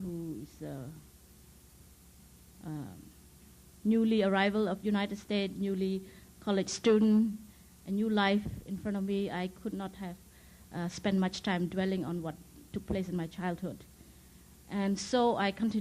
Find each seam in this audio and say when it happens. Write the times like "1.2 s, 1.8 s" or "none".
3.1 s